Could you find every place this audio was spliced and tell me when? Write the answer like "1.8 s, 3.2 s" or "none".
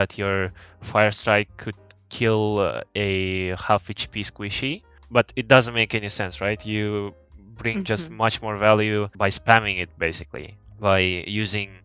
9.1 s